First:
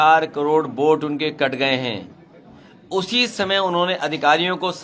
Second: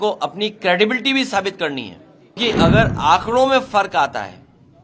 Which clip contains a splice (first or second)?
second